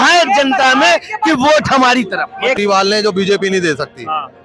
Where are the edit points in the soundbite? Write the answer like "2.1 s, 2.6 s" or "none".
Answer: 2.6 s